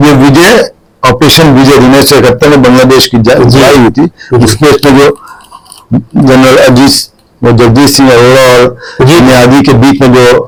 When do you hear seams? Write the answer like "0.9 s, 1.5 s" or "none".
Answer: none